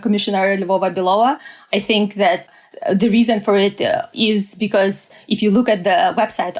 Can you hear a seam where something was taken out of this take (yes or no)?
yes